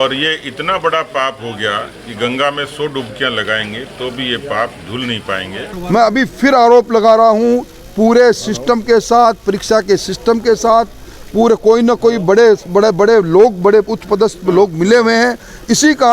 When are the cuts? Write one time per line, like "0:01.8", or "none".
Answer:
0:05.7